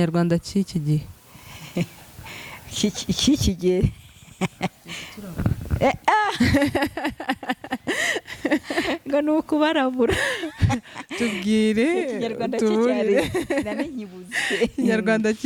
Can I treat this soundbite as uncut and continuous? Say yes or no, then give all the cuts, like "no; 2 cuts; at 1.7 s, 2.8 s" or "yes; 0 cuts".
yes; 0 cuts